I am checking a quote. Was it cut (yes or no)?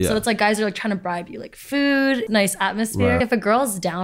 yes